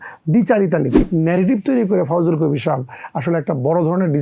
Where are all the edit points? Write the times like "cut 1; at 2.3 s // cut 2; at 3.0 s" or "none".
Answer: cut 1; at 1.0 s